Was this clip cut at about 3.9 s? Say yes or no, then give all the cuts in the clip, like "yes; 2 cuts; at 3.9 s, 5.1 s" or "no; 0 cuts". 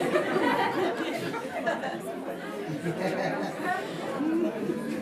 yes; 1 cut; at 3.9 s